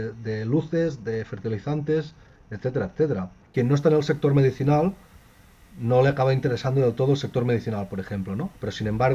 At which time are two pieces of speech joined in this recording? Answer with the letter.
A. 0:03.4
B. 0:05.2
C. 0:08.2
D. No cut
A